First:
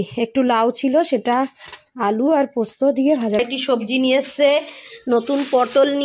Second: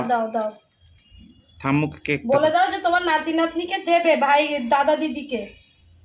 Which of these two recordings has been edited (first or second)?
first